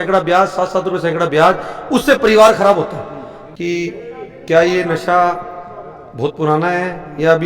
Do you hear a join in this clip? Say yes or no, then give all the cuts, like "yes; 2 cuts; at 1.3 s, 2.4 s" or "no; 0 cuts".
yes; 1 cut; at 3.5 s